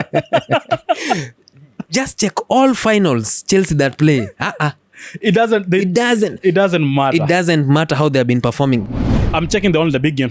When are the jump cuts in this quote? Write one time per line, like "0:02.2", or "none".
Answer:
0:08.9